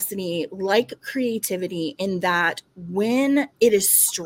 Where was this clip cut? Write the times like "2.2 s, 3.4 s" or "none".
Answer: none

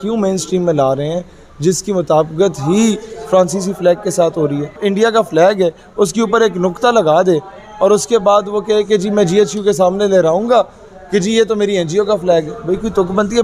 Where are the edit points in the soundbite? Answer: 4.8 s

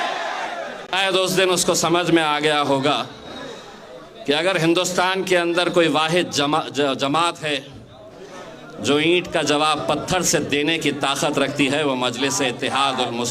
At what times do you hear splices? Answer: 0.9 s

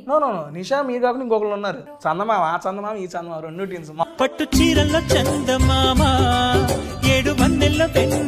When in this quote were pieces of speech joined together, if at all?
1.9 s, 4.0 s

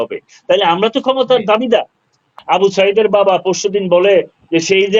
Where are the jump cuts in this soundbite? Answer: 2.2 s

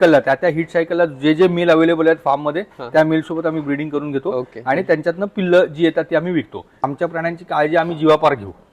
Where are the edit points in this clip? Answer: 6.8 s

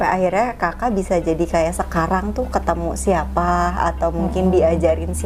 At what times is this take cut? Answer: none

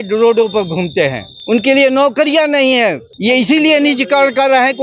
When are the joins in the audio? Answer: 1.3 s, 3.1 s

